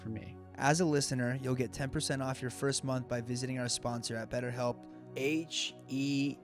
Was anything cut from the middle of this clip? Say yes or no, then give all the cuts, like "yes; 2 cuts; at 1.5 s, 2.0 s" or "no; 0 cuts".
yes; 1 cut; at 5.1 s